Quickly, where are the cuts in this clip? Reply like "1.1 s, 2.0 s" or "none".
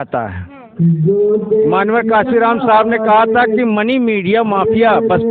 none